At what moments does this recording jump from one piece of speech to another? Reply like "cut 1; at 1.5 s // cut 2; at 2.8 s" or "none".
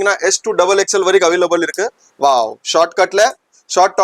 none